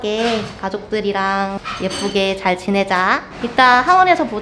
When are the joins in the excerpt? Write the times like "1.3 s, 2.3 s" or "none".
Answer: 1.6 s